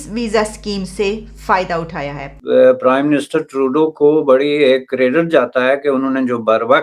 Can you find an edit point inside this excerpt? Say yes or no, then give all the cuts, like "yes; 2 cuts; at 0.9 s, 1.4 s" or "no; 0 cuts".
yes; 1 cut; at 2.3 s